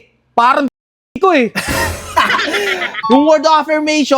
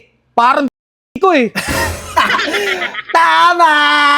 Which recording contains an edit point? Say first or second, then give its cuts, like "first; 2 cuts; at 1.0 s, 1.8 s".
first; 1 cut; at 3.0 s